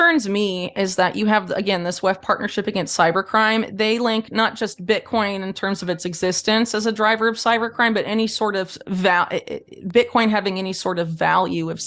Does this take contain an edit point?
no; 0 cuts

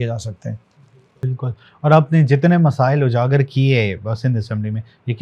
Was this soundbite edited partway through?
no; 0 cuts

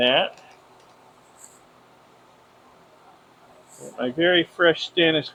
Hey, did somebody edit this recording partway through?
no; 0 cuts

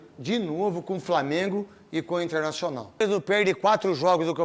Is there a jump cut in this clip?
yes; 1 cut; at 3.0 s

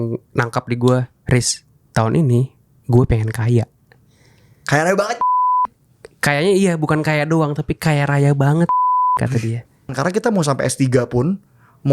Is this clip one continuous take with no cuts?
no; 1 cut; at 9.9 s

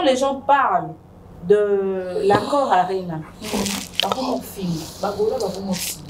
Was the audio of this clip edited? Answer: no; 0 cuts

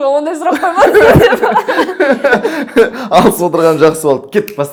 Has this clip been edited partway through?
no; 0 cuts

